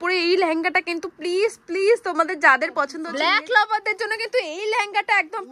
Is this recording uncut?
no; 1 cut; at 3.0 s

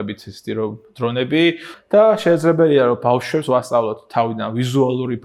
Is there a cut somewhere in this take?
yes; 1 cut; at 1.7 s

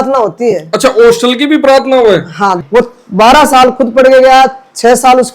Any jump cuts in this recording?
yes; 1 cut; at 2.6 s

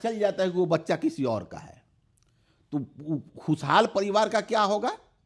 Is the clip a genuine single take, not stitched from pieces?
yes; 0 cuts

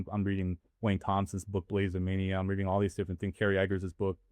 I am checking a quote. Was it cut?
no; 0 cuts

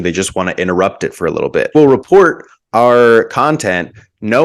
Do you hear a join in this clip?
no; 0 cuts

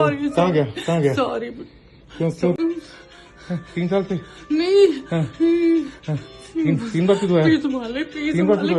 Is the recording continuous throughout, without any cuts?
no; 1 cut; at 2.6 s

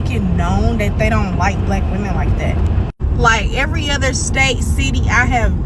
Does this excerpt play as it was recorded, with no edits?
yes; 0 cuts

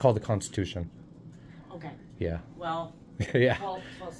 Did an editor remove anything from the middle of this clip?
no; 0 cuts

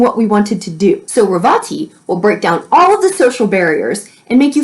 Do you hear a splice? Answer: yes; 1 cut; at 1.0 s

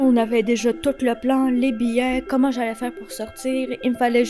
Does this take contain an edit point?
no; 0 cuts

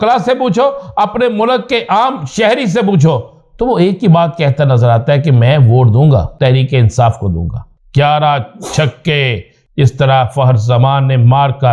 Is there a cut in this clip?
yes; 2 cuts; at 6.3 s, 7.7 s

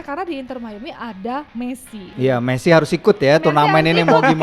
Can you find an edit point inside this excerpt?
yes; 1 cut; at 2.1 s

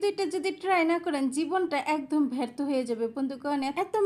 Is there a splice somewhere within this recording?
no; 0 cuts

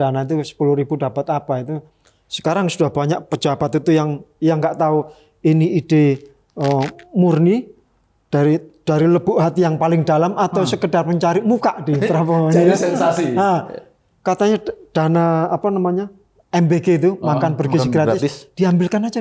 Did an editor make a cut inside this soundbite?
no; 0 cuts

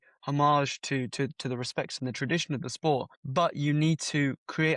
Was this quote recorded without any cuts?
no; 1 cut; at 3.2 s

